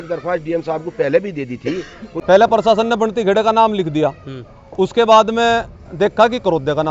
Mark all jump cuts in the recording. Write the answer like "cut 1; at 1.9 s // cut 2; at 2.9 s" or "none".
cut 1; at 2.1 s